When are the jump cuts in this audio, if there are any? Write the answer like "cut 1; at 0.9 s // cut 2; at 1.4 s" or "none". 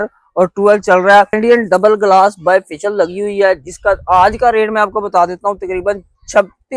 cut 1; at 1.4 s